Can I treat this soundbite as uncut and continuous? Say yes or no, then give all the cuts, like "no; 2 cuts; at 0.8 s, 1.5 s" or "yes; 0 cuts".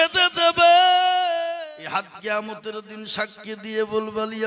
no; 1 cut; at 1.4 s